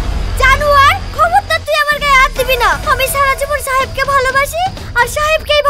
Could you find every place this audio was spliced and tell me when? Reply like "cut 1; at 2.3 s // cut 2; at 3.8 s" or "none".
none